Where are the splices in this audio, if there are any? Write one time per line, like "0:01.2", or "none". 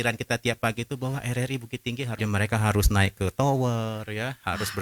0:02.2